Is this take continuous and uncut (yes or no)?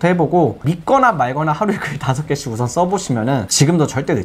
yes